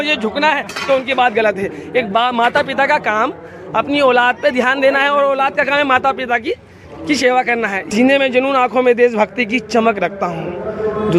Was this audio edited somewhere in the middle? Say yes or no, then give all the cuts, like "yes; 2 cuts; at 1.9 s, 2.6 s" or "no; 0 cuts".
yes; 1 cut; at 7.8 s